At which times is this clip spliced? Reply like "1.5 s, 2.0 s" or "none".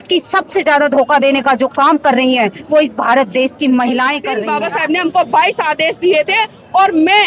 4.3 s